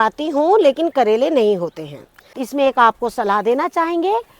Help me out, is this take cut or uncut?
cut